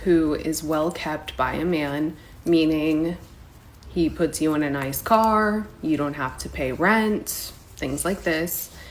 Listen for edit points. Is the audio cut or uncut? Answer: uncut